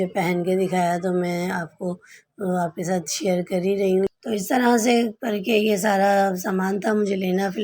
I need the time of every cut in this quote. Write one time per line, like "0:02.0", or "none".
0:04.1